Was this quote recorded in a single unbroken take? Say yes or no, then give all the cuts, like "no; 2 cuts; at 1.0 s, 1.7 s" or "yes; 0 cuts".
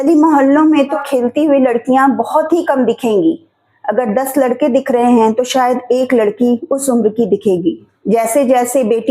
no; 2 cuts; at 0.9 s, 7.9 s